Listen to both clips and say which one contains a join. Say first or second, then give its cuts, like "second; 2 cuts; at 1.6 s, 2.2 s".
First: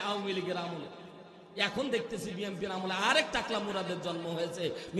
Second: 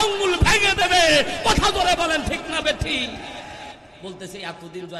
second; 1 cut; at 3.8 s